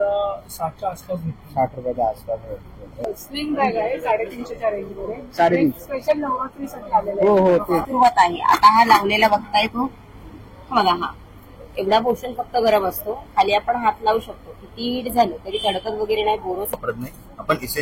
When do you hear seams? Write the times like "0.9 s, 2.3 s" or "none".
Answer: 3.2 s, 7.9 s, 16.8 s